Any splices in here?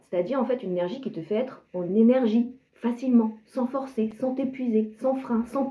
no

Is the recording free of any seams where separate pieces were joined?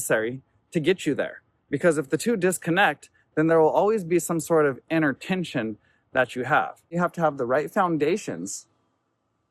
no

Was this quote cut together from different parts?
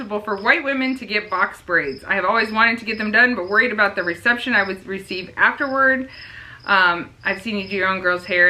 no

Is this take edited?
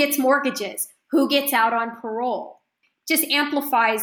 yes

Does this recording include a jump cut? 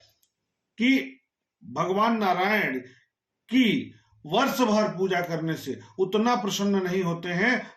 no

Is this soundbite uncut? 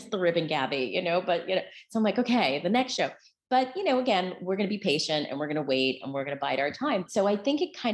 no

